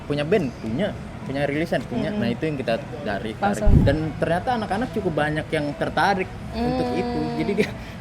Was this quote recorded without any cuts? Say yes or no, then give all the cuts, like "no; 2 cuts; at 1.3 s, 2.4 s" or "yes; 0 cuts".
no; 1 cut; at 3.8 s